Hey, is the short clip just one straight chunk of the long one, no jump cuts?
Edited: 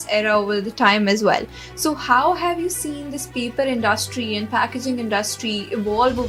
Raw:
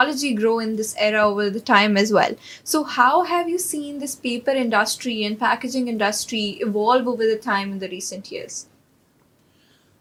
yes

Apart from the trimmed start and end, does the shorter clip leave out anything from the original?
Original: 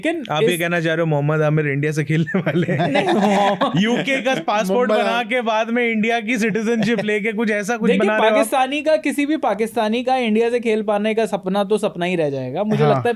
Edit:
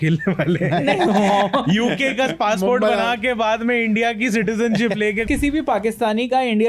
yes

